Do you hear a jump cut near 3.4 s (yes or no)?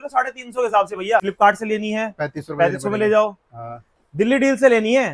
no